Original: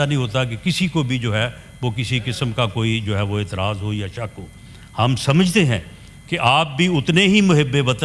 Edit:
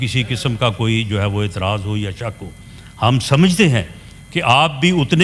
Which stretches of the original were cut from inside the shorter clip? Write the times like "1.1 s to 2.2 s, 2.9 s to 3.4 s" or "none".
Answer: none